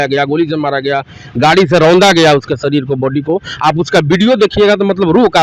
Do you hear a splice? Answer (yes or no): no